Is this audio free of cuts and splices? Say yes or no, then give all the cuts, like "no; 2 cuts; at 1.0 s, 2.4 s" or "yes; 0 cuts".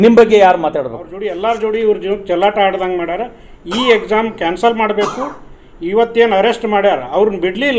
no; 1 cut; at 1.1 s